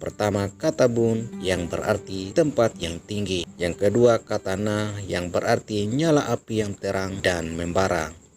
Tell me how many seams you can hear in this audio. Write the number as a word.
three